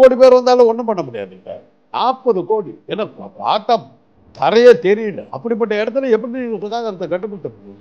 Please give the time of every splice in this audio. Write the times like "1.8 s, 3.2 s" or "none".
2.8 s, 5.3 s